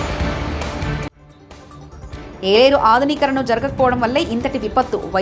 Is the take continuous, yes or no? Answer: yes